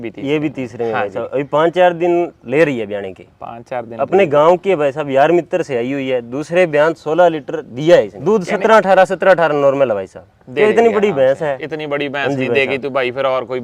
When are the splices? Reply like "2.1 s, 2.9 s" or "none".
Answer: 8.1 s

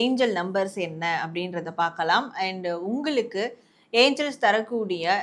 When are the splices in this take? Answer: none

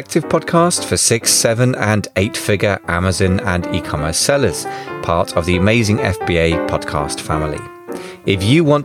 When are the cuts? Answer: none

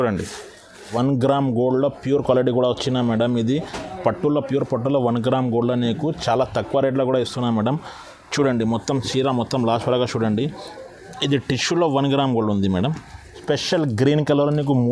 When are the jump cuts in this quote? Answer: 0.9 s, 13.4 s

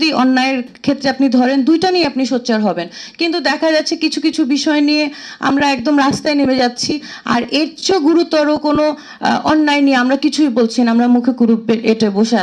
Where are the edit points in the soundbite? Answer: none

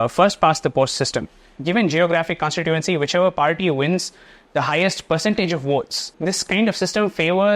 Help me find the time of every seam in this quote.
1.5 s, 6.0 s

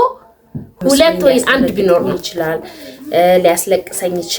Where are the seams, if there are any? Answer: 2.2 s

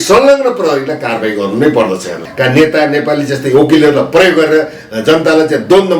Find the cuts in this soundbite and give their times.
2.2 s

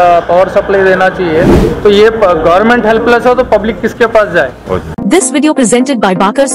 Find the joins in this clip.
1.6 s, 5.0 s

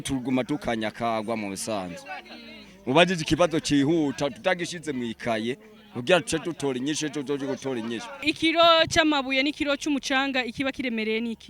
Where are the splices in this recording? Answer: 8.2 s

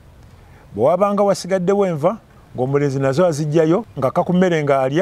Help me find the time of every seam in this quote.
3.9 s

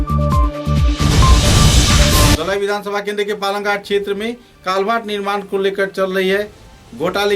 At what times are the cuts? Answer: 2.3 s

